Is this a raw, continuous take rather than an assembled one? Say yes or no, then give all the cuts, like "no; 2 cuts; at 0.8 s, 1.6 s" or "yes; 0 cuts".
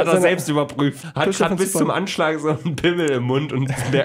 no; 1 cut; at 1.1 s